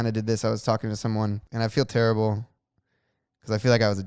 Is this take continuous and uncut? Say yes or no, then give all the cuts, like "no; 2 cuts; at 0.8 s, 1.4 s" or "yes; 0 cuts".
no; 1 cut; at 1.5 s